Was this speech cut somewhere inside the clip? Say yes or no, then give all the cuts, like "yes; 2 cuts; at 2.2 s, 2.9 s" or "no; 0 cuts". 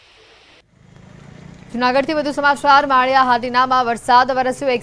yes; 1 cut; at 2.6 s